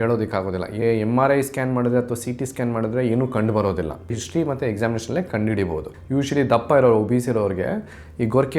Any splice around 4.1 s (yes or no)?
yes